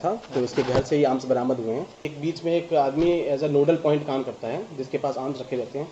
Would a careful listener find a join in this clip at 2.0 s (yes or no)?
yes